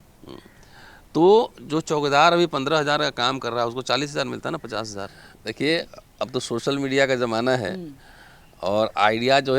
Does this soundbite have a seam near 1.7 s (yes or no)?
no